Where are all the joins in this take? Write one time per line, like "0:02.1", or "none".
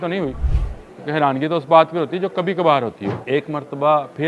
0:03.2